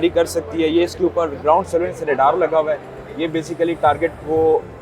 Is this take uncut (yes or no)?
yes